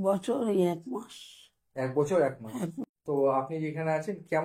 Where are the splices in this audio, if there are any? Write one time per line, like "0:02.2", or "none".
0:02.8